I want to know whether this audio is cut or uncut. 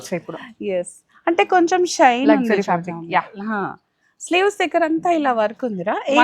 uncut